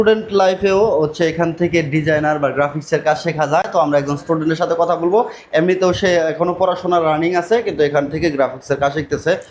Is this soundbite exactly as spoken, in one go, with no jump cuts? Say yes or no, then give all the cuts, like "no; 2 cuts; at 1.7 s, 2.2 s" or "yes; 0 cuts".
yes; 0 cuts